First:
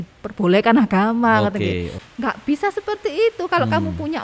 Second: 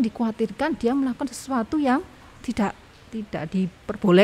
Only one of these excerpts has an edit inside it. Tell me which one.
first; 1 cut; at 2.0 s

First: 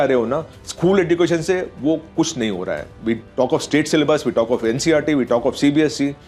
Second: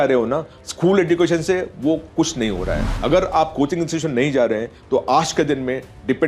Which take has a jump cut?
second; 1 cut; at 2.8 s

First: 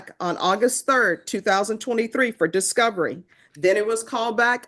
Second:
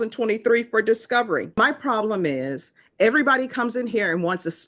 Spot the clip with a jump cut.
second; 1 cut; at 1.6 s

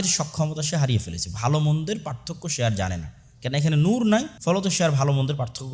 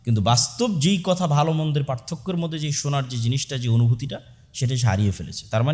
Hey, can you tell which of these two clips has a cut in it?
first; 1 cut; at 4.3 s

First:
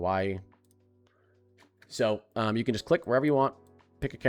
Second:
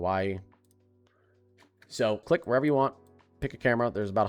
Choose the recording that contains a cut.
second; 1 cut; at 2.2 s

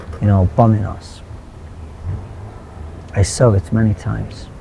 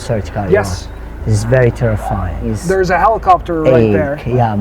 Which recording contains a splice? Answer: second; 1 cut; at 2.5 s

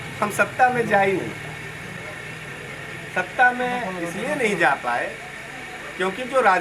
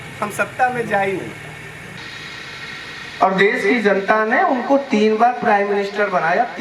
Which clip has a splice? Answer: second; 1 cut; at 2.0 s

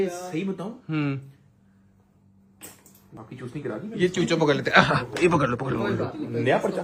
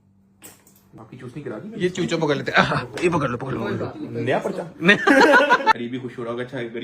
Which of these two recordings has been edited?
second; 1 cut; at 5.8 s

